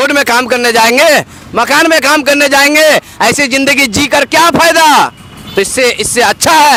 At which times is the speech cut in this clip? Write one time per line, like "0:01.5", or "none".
none